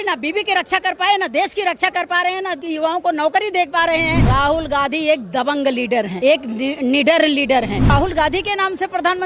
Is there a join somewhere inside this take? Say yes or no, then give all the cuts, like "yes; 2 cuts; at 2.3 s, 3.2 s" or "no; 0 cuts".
yes; 4 cuts; at 2.6 s, 4.2 s, 6.1 s, 7.9 s